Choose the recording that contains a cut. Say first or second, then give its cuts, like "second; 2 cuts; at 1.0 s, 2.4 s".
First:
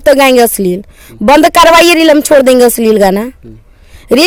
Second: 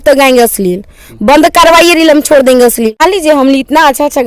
second; 1 cut; at 2.9 s